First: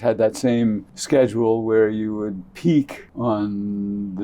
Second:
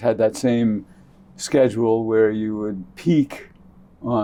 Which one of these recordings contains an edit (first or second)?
first